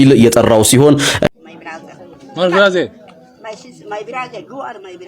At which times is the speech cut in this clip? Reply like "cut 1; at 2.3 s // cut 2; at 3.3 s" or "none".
cut 1; at 1.3 s